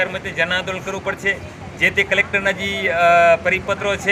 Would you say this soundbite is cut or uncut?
uncut